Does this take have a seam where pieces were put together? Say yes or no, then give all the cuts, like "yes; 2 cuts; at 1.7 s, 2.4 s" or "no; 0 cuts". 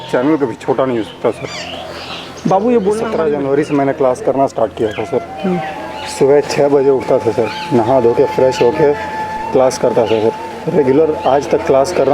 yes; 1 cut; at 3.1 s